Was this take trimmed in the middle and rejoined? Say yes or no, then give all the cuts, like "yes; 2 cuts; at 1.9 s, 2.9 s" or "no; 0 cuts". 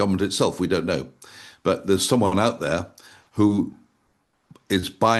no; 0 cuts